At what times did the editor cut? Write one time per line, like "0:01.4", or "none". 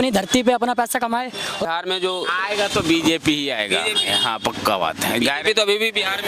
0:01.6